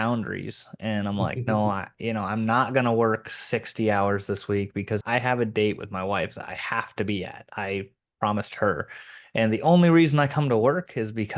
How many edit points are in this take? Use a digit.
1